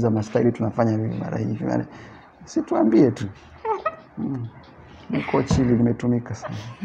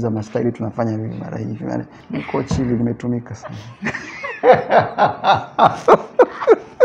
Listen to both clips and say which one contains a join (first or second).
second